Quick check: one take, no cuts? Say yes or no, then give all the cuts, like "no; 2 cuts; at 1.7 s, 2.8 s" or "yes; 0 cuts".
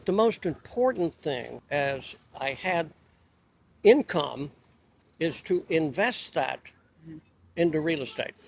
no; 1 cut; at 1.6 s